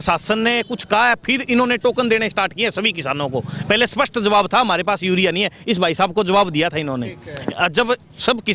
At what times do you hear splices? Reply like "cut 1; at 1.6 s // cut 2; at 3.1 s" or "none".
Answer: none

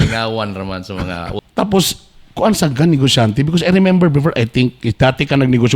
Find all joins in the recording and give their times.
cut 1; at 1.4 s

